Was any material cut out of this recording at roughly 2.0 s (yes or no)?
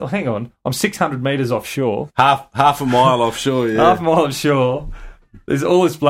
yes